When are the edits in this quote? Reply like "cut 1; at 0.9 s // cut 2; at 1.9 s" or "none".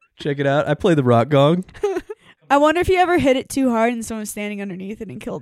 cut 1; at 2.3 s